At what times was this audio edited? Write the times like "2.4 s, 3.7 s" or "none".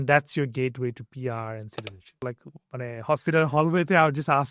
2.1 s